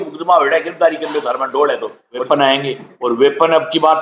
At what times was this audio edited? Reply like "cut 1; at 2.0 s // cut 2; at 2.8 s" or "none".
cut 1; at 2.2 s